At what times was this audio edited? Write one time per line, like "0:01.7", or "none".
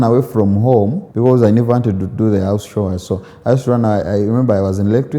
0:01.0